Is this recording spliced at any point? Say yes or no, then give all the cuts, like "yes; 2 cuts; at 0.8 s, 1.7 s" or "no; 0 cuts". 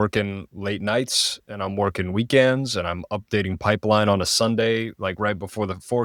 no; 0 cuts